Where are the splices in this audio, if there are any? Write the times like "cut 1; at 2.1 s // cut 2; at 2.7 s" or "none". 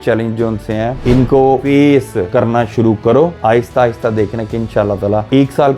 cut 1; at 1.4 s // cut 2; at 2.3 s // cut 3; at 3.4 s